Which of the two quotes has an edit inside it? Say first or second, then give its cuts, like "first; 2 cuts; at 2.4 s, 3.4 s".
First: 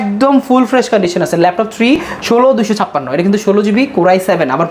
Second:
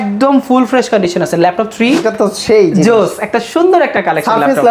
second; 1 cut; at 2.1 s